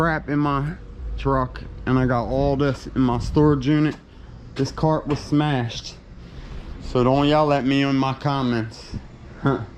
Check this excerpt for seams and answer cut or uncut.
uncut